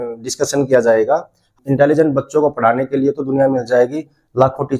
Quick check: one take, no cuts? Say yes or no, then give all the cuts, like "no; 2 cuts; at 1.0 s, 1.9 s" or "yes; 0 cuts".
no; 1 cut; at 1.5 s